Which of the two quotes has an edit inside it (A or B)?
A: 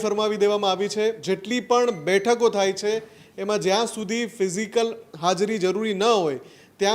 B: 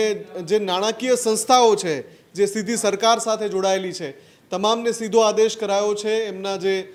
A